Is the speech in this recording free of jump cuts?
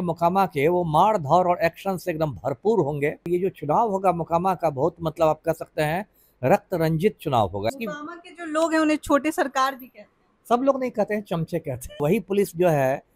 no; 3 cuts; at 3.3 s, 7.7 s, 12.0 s

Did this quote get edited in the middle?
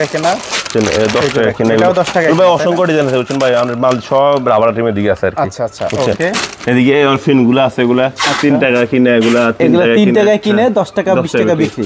no; 0 cuts

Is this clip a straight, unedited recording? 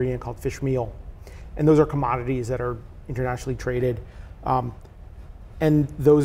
yes; 0 cuts

